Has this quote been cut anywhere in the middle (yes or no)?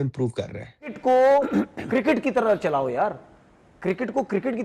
yes